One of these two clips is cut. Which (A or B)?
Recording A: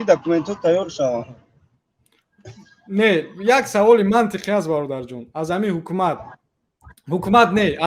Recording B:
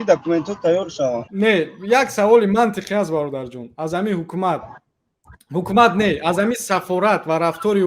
B